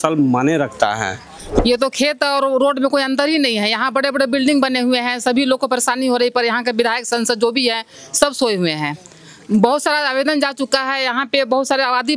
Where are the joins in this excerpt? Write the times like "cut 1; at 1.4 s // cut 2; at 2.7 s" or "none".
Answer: cut 1; at 1.6 s